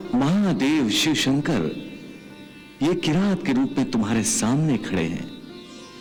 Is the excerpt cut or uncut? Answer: uncut